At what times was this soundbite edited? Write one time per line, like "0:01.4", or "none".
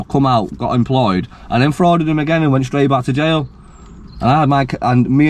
none

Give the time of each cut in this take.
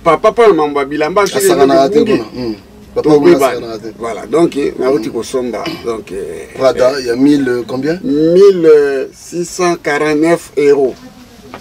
none

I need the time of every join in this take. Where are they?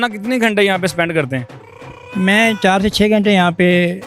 none

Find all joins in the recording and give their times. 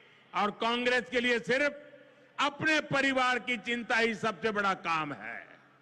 none

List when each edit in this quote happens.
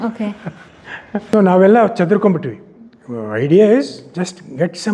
0:01.3

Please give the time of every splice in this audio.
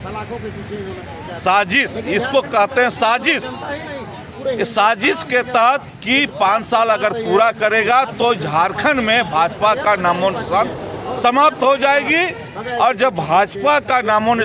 none

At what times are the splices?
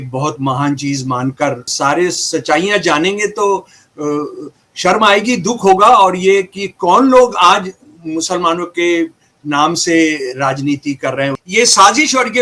0:01.7
0:11.4

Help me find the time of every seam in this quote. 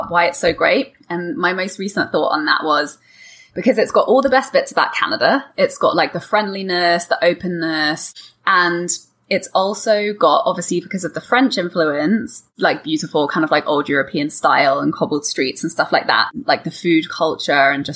0:08.0
0:12.5
0:16.3

